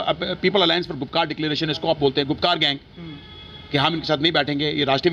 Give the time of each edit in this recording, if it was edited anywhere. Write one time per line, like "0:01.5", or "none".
none